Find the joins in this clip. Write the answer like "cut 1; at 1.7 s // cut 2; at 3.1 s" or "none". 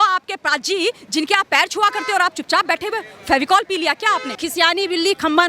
cut 1; at 4.4 s